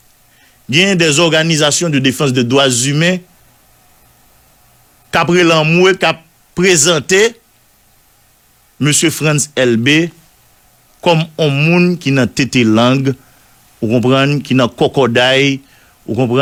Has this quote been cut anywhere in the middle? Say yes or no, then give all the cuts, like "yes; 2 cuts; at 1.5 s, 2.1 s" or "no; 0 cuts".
no; 0 cuts